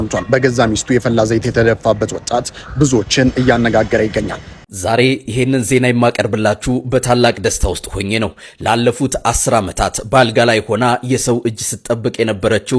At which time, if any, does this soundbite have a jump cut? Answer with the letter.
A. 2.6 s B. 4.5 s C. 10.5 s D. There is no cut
B